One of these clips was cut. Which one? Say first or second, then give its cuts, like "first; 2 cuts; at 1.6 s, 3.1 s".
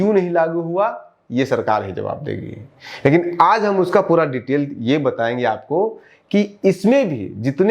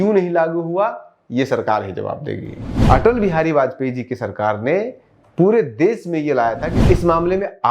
second; 2 cuts; at 2.7 s, 6.7 s